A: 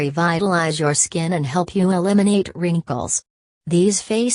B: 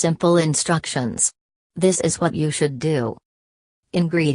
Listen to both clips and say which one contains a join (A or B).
B